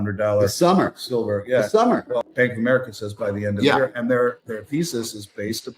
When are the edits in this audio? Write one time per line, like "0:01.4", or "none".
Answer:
0:02.2